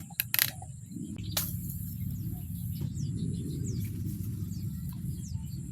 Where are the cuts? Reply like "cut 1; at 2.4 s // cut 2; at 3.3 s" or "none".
cut 1; at 1.2 s